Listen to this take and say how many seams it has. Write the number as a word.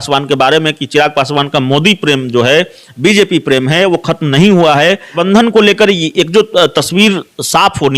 one